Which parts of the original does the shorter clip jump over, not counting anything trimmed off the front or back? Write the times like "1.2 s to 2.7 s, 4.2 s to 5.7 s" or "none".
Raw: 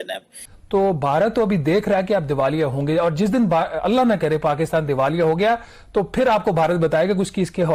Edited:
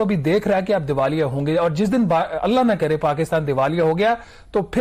none